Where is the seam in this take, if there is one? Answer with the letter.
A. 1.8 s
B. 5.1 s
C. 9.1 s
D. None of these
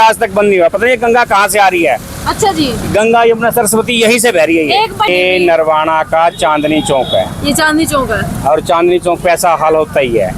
B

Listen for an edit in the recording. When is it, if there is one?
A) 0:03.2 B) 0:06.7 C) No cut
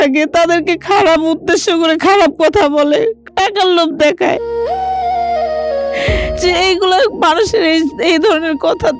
C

